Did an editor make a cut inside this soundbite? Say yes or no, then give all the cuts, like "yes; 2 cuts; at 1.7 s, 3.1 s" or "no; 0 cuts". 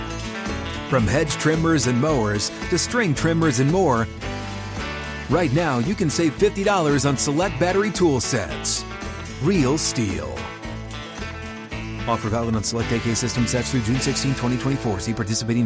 no; 0 cuts